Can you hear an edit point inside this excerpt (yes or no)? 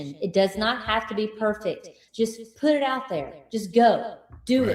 yes